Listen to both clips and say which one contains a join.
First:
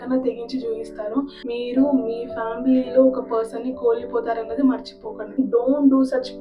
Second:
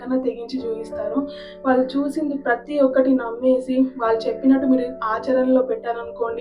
first; 2 cuts; at 1.4 s, 5.4 s

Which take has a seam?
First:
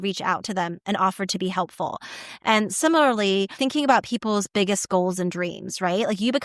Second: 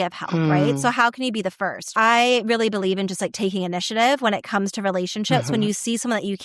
first; 1 cut; at 3.6 s

